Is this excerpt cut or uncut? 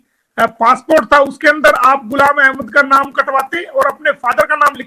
uncut